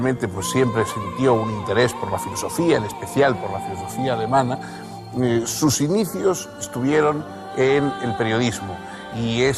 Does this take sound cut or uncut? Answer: cut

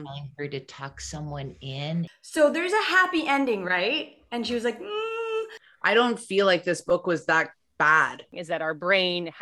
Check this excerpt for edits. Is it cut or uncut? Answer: cut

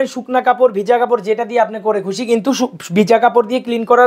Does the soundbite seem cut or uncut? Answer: uncut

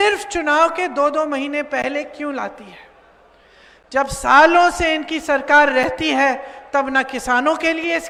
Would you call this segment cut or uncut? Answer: uncut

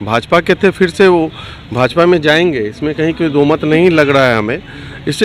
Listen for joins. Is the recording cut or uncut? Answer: uncut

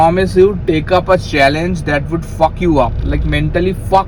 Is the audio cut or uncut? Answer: uncut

